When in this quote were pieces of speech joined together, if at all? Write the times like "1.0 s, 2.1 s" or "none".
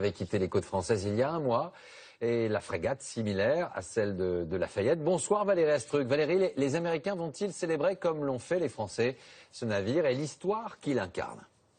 none